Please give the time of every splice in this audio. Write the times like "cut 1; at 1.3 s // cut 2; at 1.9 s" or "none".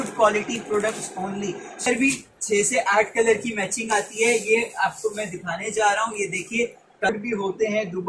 cut 1; at 1.9 s // cut 2; at 7.1 s